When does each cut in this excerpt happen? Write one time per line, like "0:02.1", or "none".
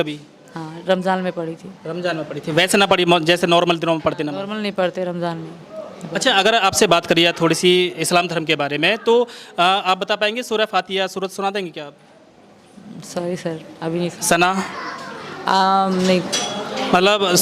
none